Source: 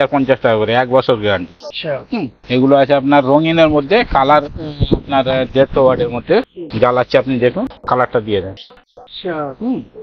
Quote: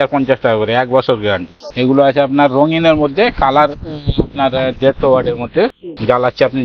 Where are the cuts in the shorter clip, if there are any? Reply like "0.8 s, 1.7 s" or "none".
1.6 s